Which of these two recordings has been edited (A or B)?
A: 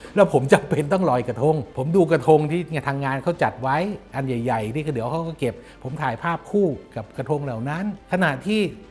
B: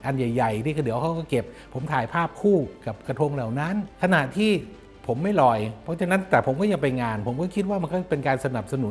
A